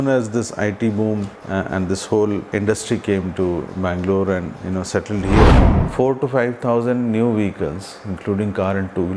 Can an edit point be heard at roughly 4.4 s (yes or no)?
no